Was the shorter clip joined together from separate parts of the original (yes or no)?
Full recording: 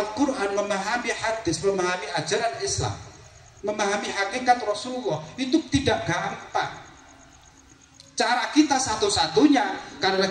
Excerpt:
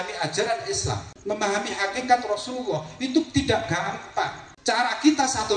yes